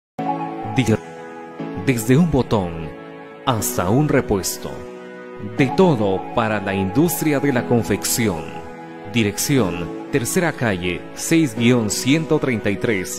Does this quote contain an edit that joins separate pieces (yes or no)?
yes